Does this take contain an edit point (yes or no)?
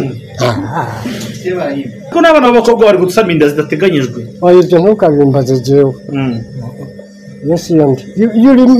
yes